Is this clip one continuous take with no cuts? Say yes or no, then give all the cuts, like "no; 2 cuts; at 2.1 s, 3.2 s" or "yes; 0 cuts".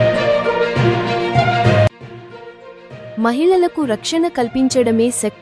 no; 1 cut; at 2.0 s